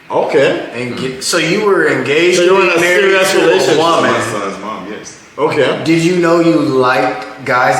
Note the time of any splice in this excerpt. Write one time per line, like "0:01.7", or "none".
none